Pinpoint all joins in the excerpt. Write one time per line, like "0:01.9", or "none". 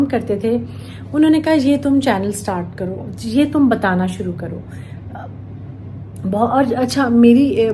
0:06.1